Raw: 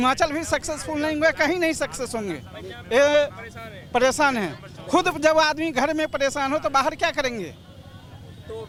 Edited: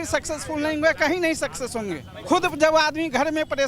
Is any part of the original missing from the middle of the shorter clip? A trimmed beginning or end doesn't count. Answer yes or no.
yes